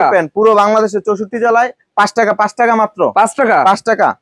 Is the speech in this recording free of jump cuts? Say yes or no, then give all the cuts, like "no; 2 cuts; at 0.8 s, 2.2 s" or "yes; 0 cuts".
yes; 0 cuts